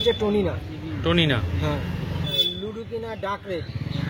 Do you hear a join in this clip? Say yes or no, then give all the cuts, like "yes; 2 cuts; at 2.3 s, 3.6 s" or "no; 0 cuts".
yes; 1 cut; at 2.4 s